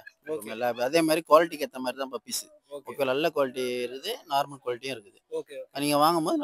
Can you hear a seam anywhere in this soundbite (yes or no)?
no